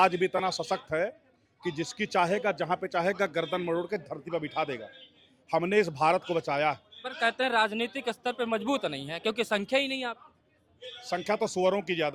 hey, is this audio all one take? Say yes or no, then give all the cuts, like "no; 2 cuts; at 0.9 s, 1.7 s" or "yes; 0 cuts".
yes; 0 cuts